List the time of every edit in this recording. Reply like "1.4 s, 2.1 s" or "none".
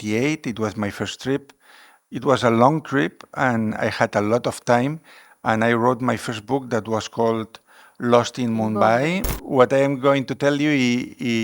9.3 s